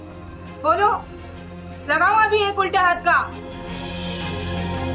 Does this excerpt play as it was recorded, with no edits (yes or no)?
yes